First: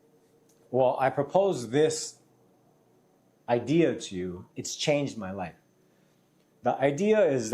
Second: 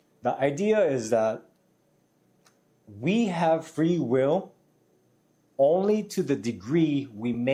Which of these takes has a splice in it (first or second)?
first